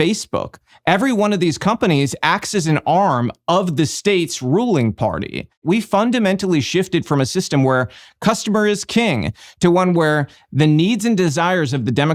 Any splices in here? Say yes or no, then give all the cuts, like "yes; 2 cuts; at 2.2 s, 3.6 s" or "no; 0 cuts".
yes; 1 cut; at 5.6 s